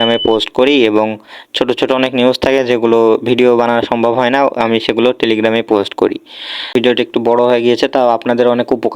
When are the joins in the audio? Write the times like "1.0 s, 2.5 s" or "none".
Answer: 6.7 s